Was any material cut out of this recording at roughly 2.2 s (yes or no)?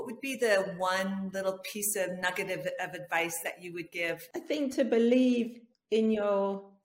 no